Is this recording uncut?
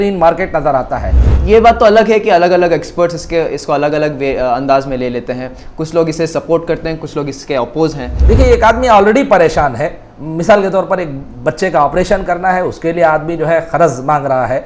no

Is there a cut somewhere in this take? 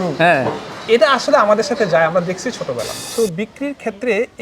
yes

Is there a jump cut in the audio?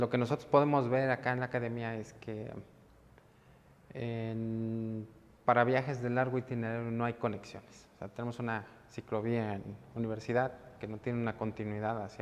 no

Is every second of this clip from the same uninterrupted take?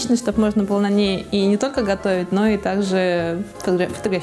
yes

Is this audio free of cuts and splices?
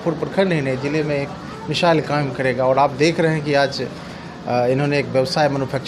yes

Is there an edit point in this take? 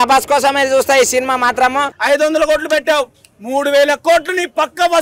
yes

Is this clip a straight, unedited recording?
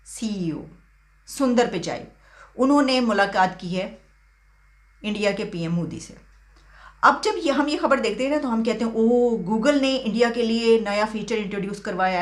yes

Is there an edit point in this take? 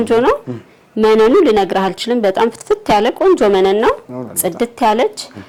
no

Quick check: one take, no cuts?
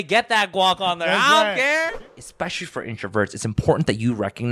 no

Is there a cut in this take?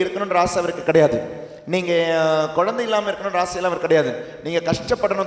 no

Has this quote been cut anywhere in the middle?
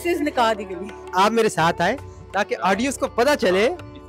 yes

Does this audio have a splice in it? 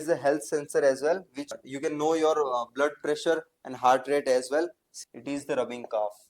yes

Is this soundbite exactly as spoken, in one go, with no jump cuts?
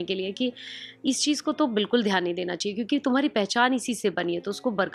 yes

